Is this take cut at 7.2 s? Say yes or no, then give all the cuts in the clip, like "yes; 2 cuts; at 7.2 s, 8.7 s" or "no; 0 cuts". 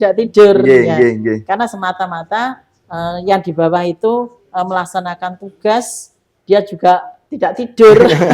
yes; 1 cut; at 7.2 s